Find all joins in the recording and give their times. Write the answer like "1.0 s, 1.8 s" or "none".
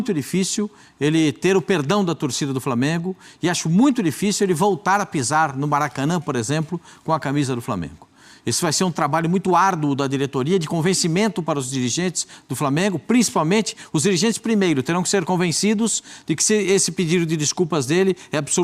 none